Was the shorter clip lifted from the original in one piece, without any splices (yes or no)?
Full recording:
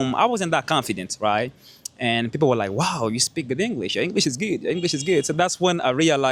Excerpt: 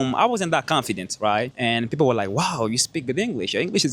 no